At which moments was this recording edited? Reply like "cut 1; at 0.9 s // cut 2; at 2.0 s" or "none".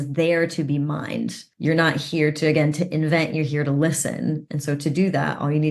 cut 1; at 1.4 s